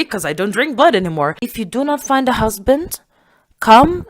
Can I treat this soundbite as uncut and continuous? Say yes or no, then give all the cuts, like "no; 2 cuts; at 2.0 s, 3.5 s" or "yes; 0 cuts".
no; 1 cut; at 1.4 s